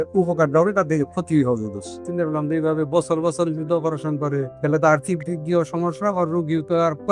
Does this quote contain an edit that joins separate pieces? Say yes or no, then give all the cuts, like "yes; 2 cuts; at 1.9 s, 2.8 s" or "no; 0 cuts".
yes; 2 cuts; at 2.0 s, 4.5 s